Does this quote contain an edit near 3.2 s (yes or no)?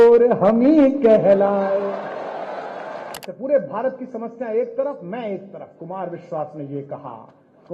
yes